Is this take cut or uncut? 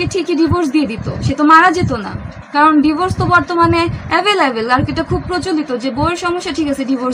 uncut